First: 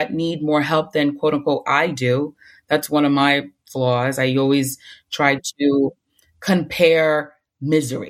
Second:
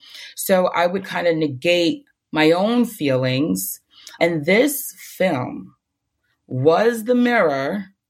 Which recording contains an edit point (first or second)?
second